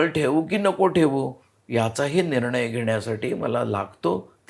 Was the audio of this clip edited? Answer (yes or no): no